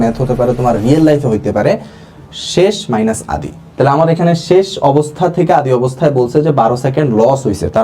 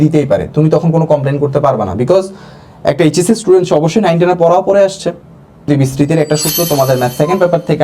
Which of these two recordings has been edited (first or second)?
second